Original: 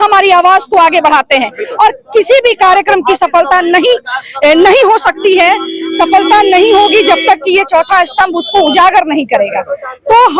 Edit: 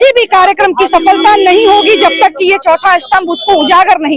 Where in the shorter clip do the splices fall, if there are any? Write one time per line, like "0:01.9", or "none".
0:01.0